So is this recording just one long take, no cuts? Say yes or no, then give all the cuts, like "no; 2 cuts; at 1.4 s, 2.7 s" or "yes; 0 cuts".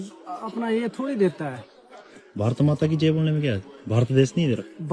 yes; 0 cuts